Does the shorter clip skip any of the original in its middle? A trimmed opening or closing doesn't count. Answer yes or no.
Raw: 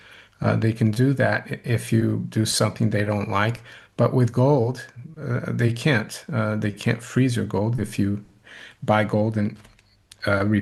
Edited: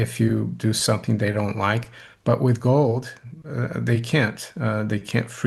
no